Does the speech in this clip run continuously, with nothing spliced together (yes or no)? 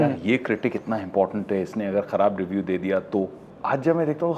yes